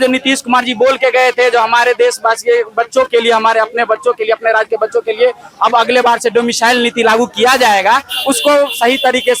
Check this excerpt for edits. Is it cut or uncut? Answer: uncut